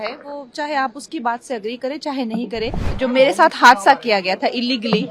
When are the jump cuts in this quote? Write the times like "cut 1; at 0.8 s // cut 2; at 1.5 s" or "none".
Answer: cut 1; at 2.8 s